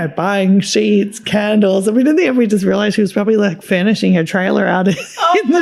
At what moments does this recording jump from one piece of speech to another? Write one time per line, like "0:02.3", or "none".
none